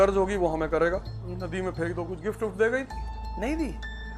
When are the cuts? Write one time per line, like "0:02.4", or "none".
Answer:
0:01.2